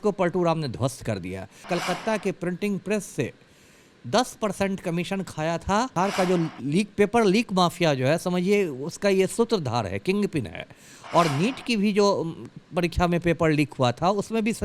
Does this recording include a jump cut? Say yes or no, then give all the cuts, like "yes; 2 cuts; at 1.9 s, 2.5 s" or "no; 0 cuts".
yes; 2 cuts; at 1.6 s, 5.9 s